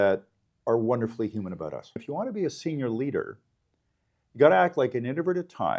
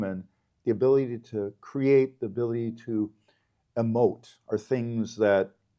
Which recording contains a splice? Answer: first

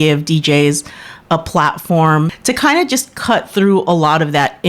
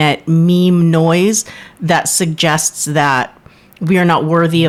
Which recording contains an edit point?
first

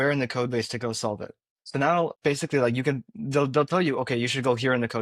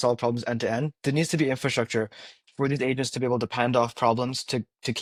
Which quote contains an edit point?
first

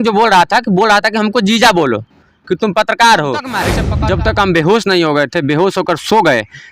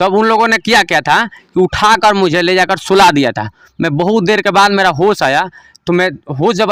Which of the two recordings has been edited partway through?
first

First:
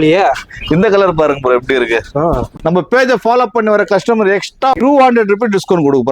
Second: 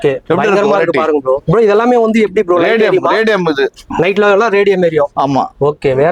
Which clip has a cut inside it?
first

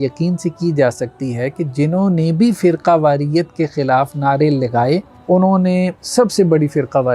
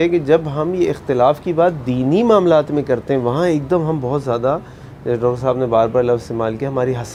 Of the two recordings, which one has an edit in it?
first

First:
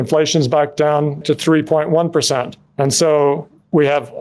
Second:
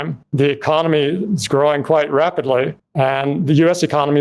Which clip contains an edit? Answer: first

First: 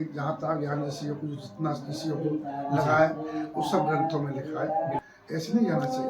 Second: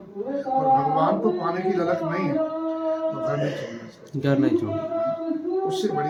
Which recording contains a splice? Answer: first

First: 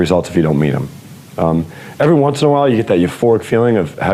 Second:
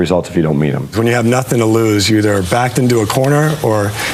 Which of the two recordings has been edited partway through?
second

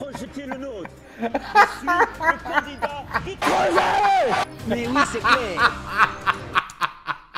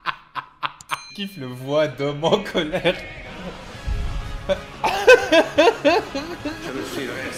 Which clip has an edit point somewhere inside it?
second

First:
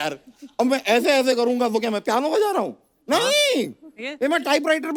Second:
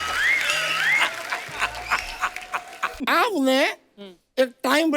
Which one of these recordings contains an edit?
second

